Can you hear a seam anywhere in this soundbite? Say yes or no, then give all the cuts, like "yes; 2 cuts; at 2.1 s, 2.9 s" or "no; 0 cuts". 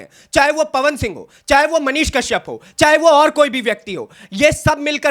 no; 0 cuts